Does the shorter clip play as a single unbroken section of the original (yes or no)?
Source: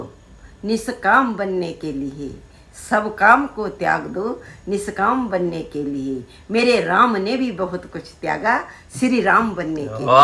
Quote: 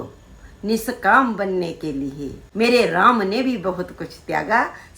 no